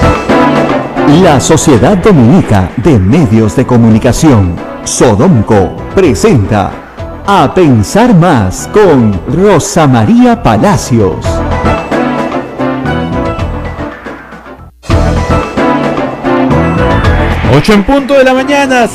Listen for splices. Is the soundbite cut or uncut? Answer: cut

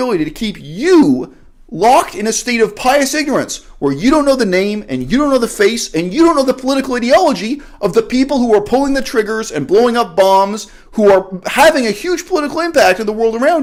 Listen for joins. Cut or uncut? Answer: uncut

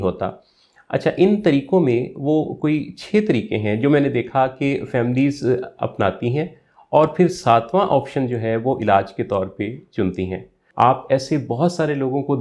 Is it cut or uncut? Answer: cut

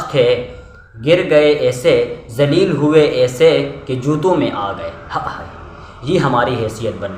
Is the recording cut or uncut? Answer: uncut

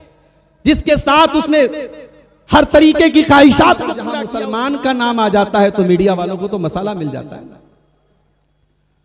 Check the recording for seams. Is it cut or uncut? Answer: cut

